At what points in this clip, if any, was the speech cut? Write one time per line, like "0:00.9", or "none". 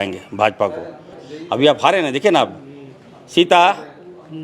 0:01.2